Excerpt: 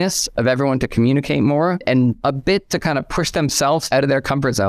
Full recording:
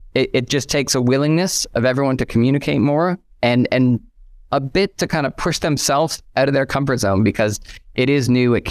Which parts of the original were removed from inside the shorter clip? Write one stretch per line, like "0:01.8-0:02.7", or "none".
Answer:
0:03.3-0:04.2
0:06.1-0:06.3